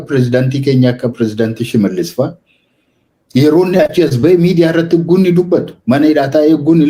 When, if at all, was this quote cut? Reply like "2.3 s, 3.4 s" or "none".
none

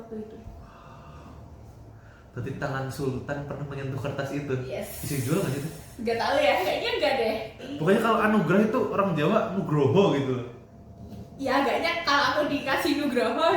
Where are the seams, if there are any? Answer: 7.6 s

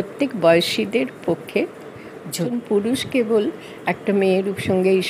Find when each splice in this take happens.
2.5 s

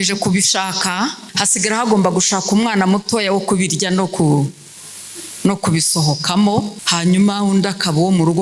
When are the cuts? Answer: 1.3 s, 6.8 s

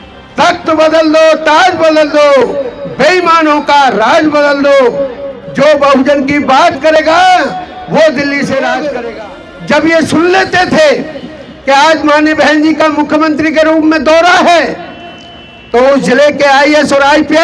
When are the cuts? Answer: 8.9 s

